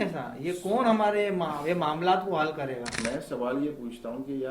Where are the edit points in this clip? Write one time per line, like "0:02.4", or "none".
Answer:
0:02.9